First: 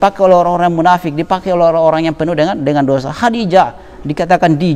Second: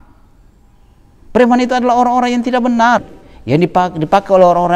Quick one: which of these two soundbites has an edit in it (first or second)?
second